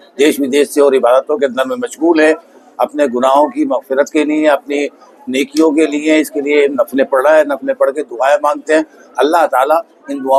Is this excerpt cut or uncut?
uncut